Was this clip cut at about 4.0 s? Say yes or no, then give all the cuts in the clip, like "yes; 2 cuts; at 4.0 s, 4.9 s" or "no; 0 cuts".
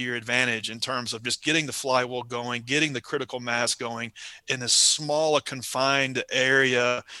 no; 0 cuts